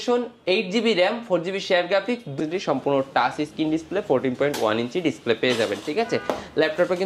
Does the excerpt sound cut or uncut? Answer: cut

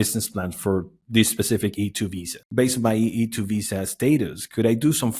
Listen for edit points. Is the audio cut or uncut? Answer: cut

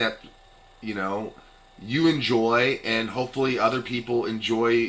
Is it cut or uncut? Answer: uncut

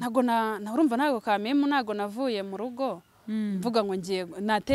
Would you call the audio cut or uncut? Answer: uncut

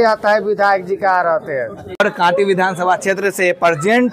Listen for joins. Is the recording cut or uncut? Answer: cut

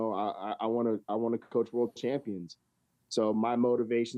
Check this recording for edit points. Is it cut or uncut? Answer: uncut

